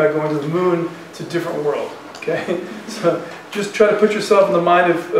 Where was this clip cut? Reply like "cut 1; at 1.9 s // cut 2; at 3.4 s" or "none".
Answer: none